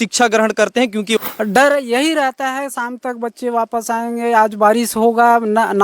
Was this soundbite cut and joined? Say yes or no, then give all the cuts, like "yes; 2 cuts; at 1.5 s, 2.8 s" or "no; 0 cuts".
yes; 1 cut; at 1.2 s